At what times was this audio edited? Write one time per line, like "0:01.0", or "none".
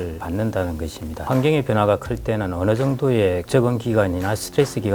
0:01.2